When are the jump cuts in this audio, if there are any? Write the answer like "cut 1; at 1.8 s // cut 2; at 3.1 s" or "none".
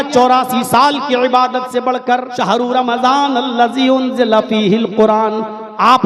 cut 1; at 2.3 s